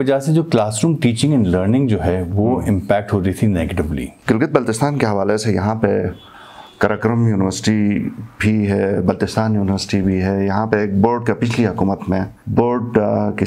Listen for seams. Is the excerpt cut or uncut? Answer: cut